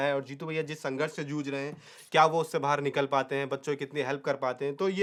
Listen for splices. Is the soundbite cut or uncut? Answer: uncut